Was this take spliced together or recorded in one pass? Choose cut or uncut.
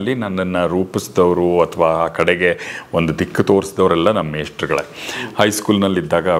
uncut